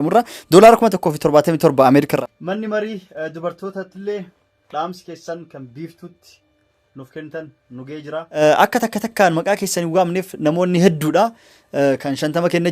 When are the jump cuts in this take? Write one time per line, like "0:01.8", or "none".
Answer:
0:02.1
0:08.4